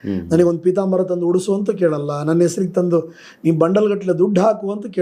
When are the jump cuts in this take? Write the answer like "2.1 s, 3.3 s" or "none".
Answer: none